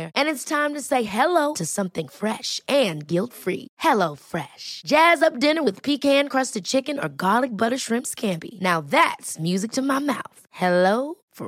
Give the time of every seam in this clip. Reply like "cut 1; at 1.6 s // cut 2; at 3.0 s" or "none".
none